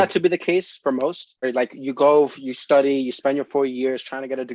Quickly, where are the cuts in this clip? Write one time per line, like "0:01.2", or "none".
0:01.4